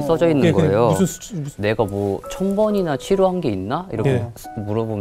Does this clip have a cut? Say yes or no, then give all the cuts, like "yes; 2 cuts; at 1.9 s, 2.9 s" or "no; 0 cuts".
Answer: yes; 1 cut; at 1.5 s